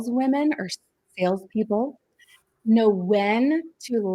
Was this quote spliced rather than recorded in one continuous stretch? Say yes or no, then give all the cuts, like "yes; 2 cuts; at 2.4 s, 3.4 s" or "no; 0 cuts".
no; 0 cuts